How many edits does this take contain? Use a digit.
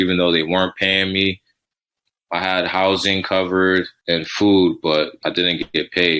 3